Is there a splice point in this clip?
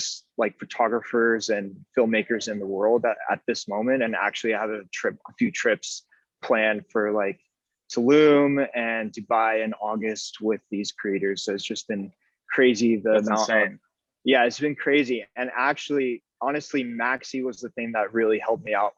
no; 0 cuts

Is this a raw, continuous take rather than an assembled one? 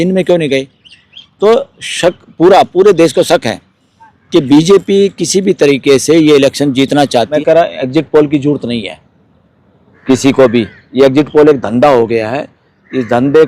no; 1 cut; at 7.3 s

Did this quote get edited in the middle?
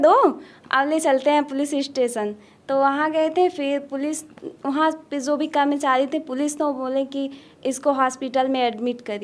no; 0 cuts

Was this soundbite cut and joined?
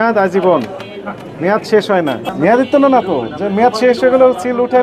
yes; 1 cut; at 2.3 s

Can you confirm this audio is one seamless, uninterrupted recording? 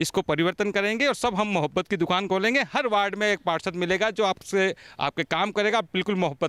yes; 0 cuts

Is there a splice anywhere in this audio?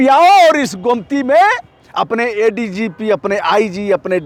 no; 0 cuts

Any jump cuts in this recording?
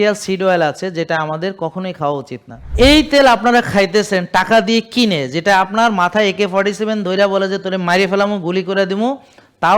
yes; 1 cut; at 2.7 s

